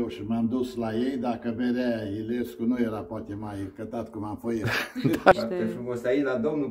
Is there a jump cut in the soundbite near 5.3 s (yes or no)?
yes